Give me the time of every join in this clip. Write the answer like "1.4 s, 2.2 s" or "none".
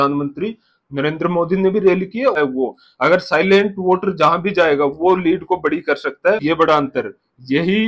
2.4 s, 6.4 s